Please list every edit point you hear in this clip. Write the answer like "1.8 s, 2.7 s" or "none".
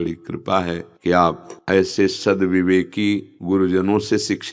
0.9 s, 1.5 s, 3.3 s